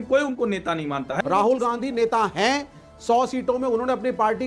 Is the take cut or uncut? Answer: cut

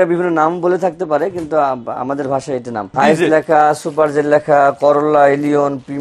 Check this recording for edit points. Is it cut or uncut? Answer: cut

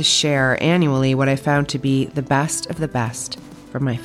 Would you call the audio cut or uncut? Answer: uncut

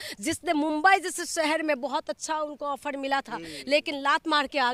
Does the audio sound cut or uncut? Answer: uncut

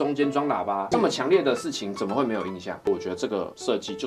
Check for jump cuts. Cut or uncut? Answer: cut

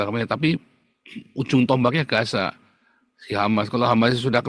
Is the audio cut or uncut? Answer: uncut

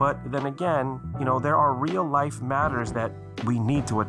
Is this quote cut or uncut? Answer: cut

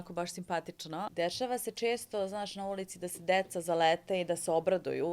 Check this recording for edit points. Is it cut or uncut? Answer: cut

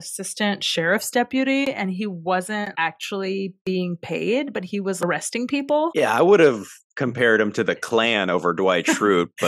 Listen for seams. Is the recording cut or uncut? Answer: cut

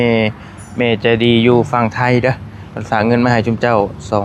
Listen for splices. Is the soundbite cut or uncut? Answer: uncut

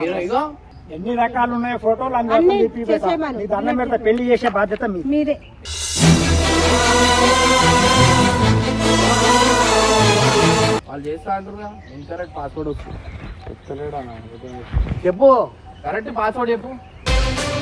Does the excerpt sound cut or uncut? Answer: cut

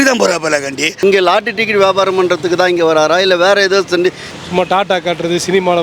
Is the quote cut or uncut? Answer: cut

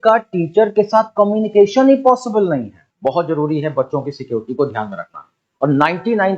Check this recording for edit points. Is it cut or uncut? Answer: cut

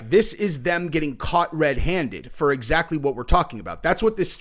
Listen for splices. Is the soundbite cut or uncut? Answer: uncut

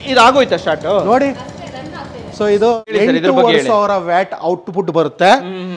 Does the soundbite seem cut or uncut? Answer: cut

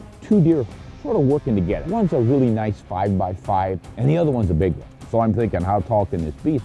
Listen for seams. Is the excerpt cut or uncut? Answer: cut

